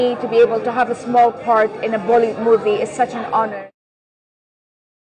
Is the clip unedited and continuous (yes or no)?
yes